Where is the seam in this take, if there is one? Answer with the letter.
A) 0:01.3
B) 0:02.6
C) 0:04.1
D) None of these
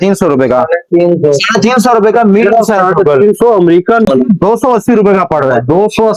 C